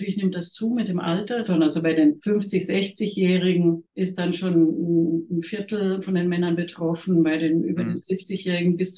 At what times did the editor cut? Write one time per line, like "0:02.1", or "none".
0:01.4
0:02.2
0:03.9
0:06.0
0:08.0